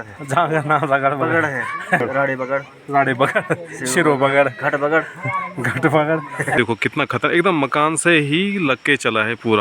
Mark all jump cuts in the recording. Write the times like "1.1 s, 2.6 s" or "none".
2.0 s, 6.6 s